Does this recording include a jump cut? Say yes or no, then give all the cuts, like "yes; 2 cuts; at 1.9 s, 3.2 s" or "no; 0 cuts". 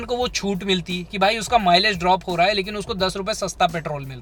no; 0 cuts